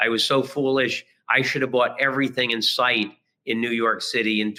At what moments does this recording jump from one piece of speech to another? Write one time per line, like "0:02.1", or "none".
none